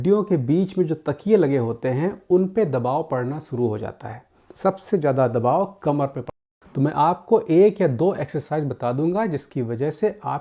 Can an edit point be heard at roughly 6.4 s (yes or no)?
yes